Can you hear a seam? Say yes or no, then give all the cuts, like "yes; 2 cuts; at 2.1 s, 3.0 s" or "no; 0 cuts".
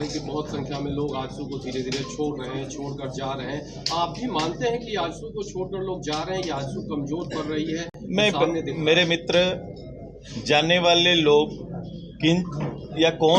no; 0 cuts